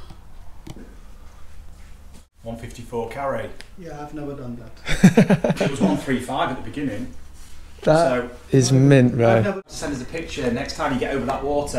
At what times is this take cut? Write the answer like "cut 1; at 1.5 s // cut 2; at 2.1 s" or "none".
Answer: cut 1; at 2.3 s // cut 2; at 9.6 s